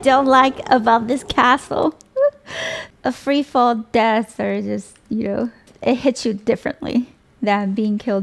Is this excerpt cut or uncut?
uncut